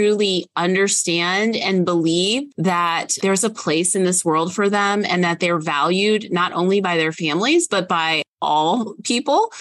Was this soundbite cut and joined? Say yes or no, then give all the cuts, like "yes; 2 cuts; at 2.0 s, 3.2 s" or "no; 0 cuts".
yes; 1 cut; at 2.5 s